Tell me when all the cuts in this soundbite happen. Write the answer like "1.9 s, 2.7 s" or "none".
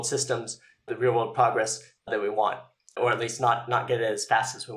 0.9 s, 2.1 s, 3.0 s